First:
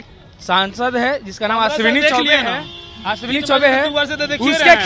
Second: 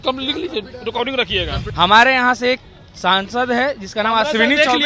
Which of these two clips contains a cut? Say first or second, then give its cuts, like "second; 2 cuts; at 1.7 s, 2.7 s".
second; 1 cut; at 1.6 s